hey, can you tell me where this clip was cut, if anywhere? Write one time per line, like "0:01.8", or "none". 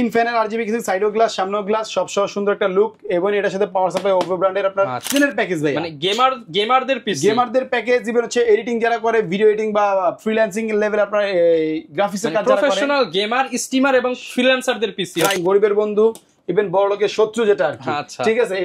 0:05.1
0:15.4

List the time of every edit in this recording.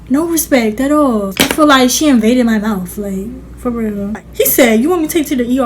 0:01.3
0:04.2

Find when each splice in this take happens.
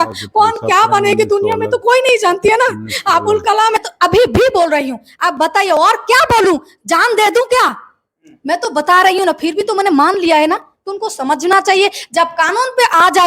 0:03.8

